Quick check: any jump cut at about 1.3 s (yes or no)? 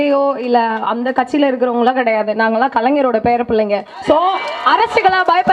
no